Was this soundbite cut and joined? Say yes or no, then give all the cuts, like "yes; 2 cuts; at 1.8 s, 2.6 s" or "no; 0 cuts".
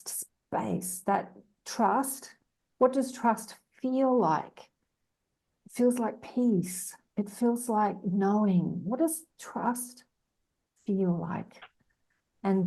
no; 0 cuts